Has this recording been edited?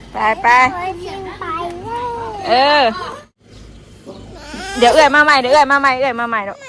yes; 1 cut; at 3.4 s

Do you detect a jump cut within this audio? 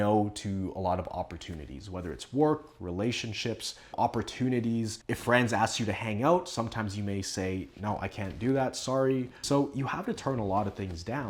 yes; 1 cut; at 9.3 s

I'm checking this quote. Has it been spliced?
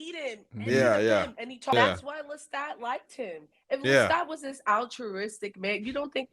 yes; 1 cut; at 1.7 s

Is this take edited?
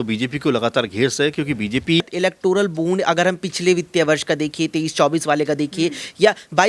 yes; 1 cut; at 2.1 s

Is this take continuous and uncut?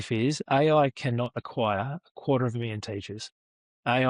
yes; 0 cuts

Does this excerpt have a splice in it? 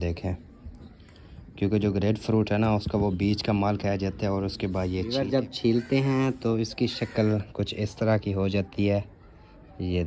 yes; 1 cut; at 5.1 s

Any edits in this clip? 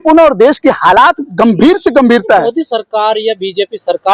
no; 0 cuts

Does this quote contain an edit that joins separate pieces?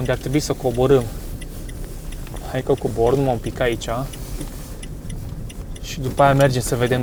no; 0 cuts

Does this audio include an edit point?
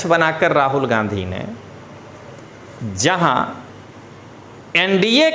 no; 0 cuts

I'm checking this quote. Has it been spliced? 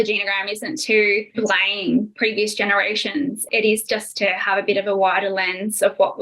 yes; 1 cut; at 3.4 s

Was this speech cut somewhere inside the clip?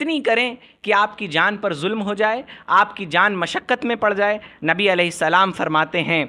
no; 0 cuts

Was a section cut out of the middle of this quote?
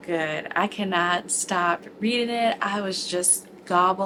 no; 0 cuts

